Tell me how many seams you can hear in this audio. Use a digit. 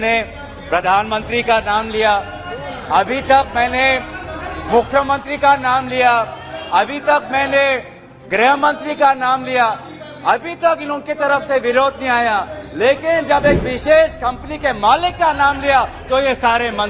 0